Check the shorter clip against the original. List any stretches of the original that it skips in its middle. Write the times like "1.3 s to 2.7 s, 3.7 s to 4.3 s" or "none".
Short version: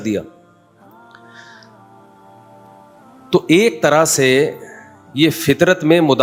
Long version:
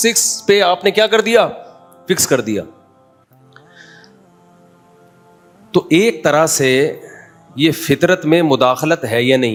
none